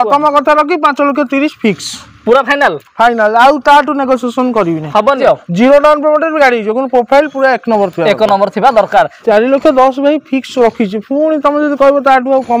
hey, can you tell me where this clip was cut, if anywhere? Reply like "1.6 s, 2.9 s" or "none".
5.2 s, 9.2 s